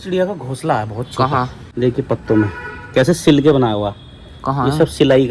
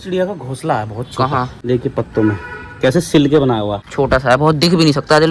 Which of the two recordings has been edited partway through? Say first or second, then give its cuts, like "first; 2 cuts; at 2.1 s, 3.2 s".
second; 2 cuts; at 1.5 s, 3.8 s